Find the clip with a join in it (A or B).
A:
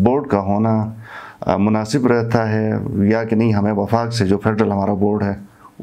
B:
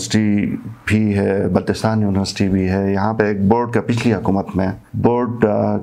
B